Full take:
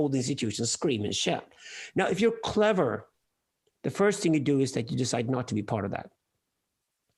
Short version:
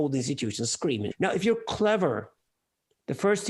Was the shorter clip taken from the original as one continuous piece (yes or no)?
no